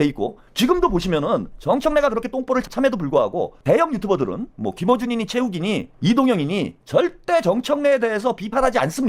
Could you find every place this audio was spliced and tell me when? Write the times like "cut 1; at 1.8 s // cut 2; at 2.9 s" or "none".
cut 1; at 2.7 s // cut 2; at 6.8 s